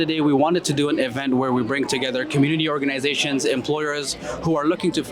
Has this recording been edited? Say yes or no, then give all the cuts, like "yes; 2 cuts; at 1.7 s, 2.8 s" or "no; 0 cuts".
no; 0 cuts